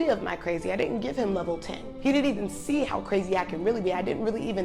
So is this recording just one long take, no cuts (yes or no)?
no